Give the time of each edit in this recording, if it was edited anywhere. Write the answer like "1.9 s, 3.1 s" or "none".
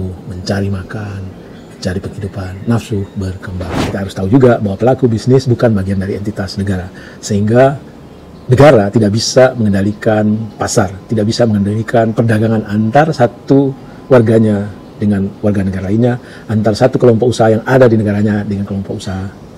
4.0 s